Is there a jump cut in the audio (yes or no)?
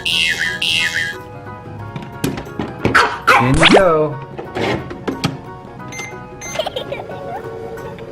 yes